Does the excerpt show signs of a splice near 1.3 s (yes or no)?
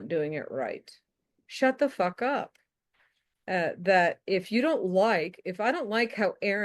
yes